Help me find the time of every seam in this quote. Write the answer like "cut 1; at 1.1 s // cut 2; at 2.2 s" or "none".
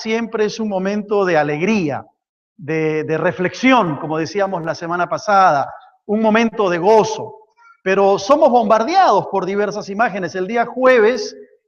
cut 1; at 6.8 s